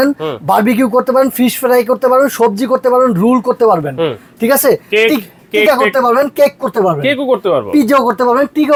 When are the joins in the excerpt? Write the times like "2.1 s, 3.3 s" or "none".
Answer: none